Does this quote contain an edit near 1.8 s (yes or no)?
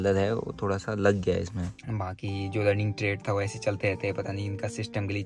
yes